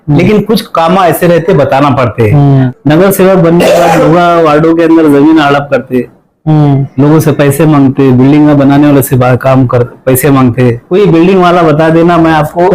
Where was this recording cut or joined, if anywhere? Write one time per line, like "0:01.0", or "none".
0:02.7
0:10.8